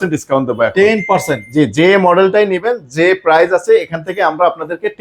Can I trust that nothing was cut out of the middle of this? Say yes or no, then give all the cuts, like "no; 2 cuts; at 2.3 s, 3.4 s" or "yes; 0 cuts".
yes; 0 cuts